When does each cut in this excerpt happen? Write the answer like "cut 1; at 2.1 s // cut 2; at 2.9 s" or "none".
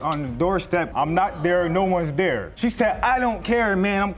cut 1; at 0.9 s